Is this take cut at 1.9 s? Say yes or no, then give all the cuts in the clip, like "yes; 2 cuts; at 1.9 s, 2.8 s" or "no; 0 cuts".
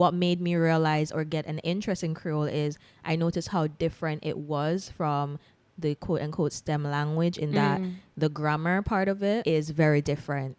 no; 1 cut; at 9.4 s